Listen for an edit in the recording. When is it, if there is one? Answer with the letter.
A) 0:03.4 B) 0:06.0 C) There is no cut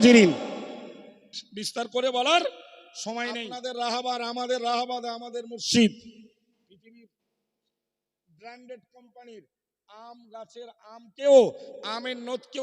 A